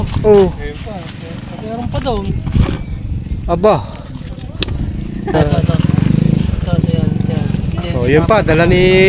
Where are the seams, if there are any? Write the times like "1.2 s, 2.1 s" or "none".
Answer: 5.3 s